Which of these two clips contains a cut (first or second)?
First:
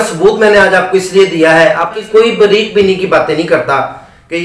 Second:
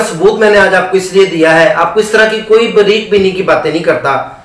first